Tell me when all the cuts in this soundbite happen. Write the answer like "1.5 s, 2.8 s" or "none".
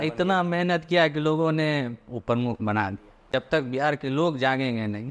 3.2 s